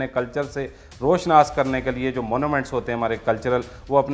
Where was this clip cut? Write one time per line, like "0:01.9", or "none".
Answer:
none